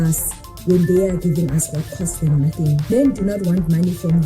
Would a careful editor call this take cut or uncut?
cut